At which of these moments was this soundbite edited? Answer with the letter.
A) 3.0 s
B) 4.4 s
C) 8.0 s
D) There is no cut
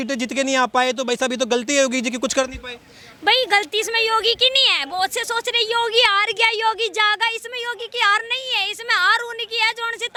D